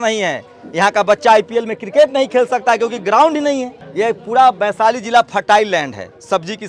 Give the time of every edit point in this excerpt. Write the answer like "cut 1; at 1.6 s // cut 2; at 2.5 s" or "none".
cut 1; at 3.8 s